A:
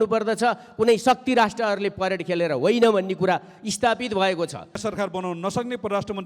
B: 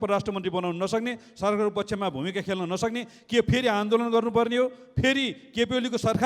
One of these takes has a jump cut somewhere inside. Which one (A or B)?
A